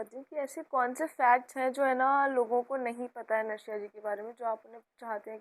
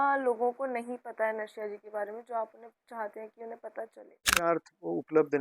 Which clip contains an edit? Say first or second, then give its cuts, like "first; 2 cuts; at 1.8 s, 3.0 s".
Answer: second; 1 cut; at 4.4 s